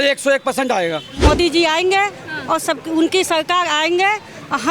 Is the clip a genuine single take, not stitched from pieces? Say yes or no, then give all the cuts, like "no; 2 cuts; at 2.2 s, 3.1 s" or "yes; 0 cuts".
no; 1 cut; at 1.2 s